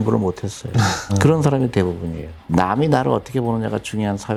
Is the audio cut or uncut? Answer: uncut